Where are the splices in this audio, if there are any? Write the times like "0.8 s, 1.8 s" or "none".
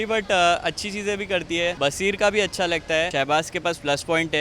1.8 s, 3.1 s